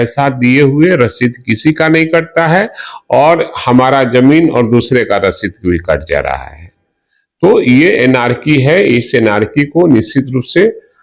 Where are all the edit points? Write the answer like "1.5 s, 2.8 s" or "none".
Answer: none